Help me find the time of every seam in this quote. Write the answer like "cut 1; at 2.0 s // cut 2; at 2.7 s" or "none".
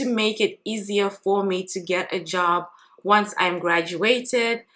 none